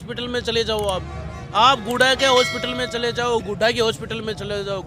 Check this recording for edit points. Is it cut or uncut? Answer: uncut